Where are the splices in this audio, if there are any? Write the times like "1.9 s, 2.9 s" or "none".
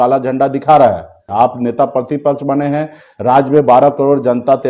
1.2 s

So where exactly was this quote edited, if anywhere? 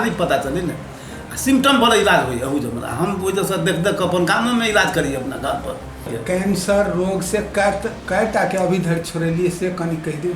6.1 s

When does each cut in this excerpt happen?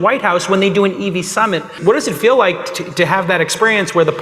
1.7 s

